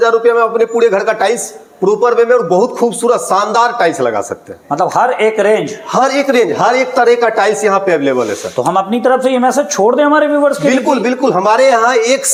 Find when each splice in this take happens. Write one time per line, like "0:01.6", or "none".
none